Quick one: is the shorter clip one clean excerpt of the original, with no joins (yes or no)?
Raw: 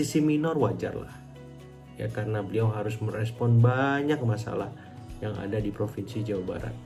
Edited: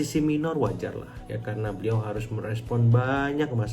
no